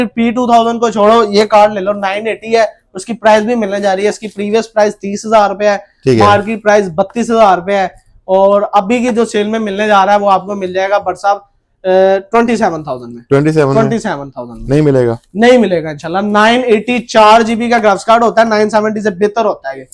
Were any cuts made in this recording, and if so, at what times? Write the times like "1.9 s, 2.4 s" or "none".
none